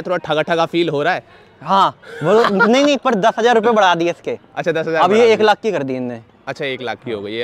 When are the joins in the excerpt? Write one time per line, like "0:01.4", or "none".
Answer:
none